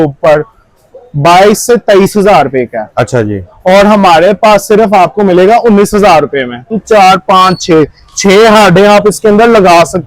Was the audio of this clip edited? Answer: yes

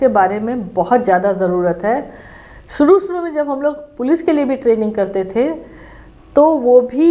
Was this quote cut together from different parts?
no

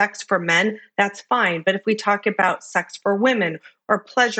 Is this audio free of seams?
yes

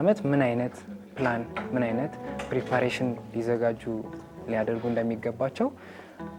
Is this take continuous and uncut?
yes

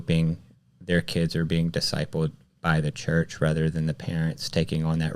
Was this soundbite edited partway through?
no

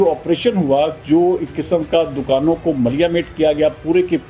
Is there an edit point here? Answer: no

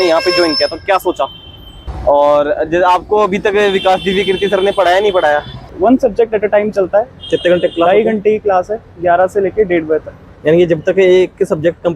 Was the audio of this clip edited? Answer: yes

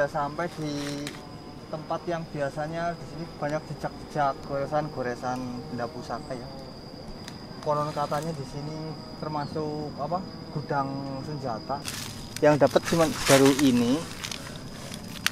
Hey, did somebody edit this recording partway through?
no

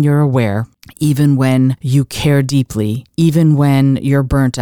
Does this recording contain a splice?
yes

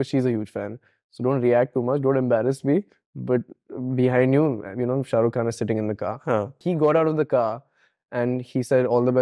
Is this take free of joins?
no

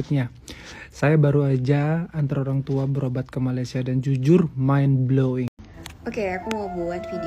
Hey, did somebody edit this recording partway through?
yes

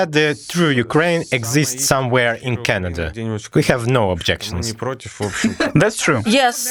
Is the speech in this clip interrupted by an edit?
no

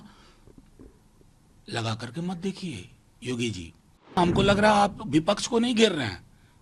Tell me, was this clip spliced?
yes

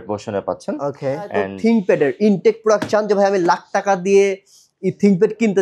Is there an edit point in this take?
yes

